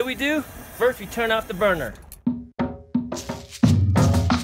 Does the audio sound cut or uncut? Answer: cut